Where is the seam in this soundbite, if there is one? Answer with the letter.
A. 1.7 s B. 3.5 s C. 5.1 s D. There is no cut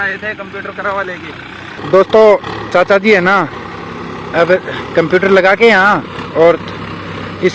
A